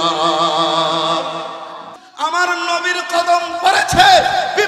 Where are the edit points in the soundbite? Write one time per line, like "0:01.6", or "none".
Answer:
0:02.1